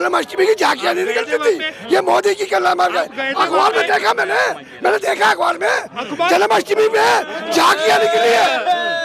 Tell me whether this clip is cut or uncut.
uncut